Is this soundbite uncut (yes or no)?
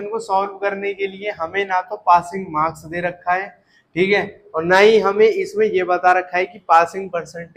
yes